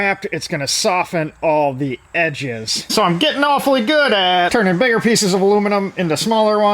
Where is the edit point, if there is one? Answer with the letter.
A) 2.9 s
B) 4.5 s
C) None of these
A